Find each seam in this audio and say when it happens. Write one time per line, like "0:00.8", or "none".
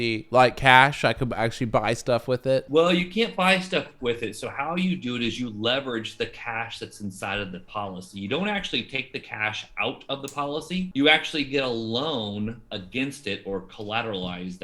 0:02.7
0:10.9